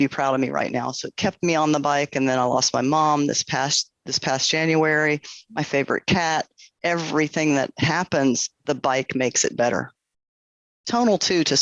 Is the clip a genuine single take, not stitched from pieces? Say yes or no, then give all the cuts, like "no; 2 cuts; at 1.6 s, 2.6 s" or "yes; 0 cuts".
yes; 0 cuts